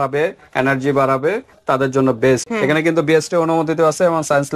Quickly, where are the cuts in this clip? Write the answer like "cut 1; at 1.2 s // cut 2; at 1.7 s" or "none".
cut 1; at 2.4 s